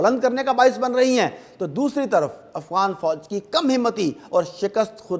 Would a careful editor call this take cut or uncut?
uncut